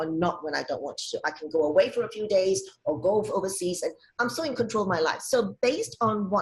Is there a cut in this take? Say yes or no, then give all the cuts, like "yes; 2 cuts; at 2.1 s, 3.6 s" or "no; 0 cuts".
no; 0 cuts